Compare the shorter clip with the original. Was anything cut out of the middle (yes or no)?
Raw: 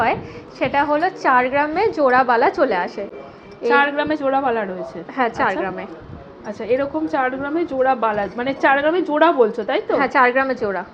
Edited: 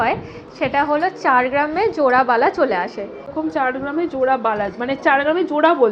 yes